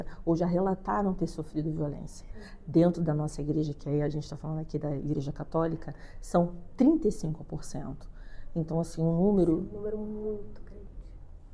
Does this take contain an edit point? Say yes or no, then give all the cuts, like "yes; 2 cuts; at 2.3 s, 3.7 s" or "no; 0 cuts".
no; 0 cuts